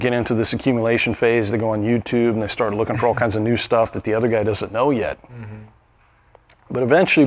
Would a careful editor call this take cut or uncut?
uncut